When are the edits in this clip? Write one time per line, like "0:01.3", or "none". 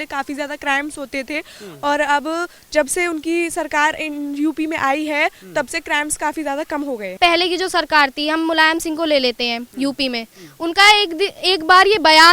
0:07.2